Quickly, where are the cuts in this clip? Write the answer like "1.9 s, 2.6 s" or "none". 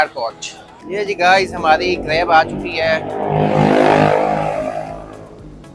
none